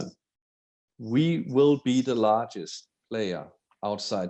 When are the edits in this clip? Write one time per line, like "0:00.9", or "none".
0:00.9